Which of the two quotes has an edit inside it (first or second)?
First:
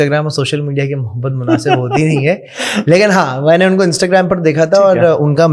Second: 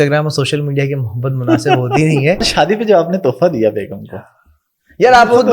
second